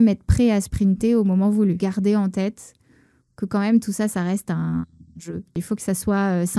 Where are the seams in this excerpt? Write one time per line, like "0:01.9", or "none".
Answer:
0:01.8
0:05.6